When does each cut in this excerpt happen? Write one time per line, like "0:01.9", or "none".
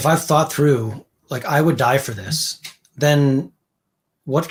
none